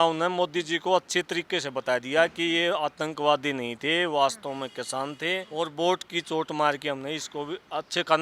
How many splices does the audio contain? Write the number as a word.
one